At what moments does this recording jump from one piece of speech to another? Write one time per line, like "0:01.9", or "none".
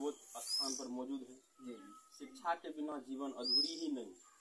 none